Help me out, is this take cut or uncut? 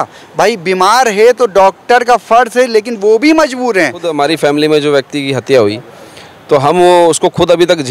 cut